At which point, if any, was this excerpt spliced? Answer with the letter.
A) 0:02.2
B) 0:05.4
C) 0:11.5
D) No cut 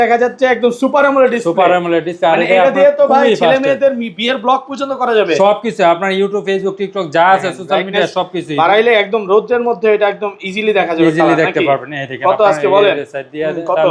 D